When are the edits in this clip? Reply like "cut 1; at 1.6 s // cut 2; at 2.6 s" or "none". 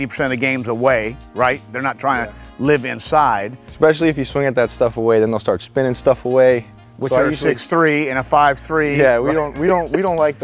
none